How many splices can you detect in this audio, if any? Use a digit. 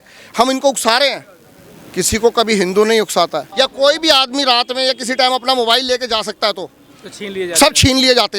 1